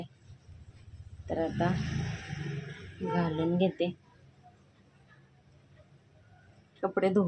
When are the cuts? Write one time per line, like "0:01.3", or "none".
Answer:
none